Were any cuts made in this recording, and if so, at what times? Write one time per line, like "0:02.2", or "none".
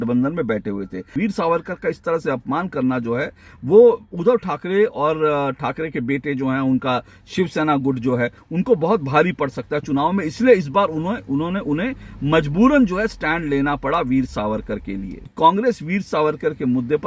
0:01.1
0:15.2